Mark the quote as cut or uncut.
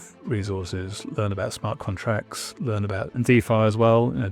cut